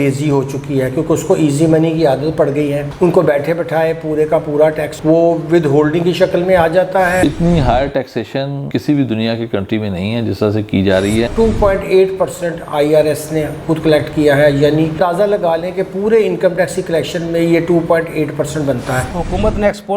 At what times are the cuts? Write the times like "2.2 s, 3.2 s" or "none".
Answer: 7.2 s, 11.3 s, 15.0 s, 19.1 s